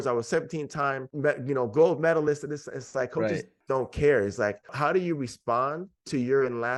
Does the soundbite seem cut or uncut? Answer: uncut